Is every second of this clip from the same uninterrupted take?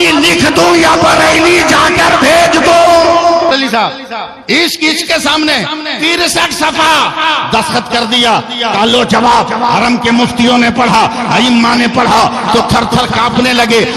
no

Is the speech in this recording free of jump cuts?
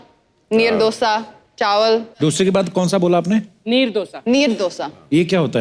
yes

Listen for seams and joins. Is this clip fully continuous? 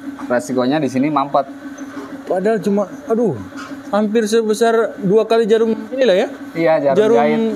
yes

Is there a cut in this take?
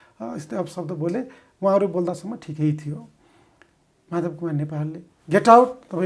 no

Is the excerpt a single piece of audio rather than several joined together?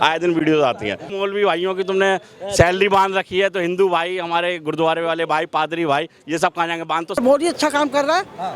no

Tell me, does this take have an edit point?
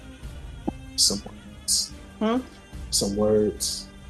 no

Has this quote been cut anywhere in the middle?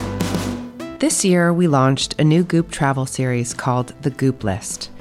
yes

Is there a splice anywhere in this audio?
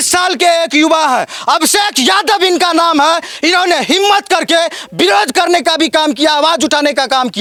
no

